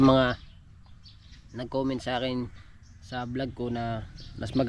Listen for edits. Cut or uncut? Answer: uncut